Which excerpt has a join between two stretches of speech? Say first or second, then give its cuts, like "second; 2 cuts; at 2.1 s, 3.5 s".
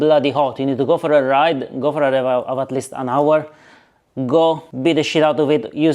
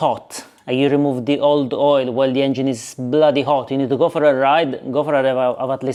first; 1 cut; at 4.7 s